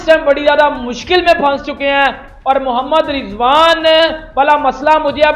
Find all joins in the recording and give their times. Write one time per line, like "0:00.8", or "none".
none